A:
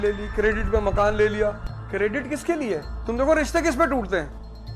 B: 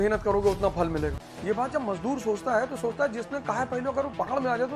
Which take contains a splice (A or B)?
A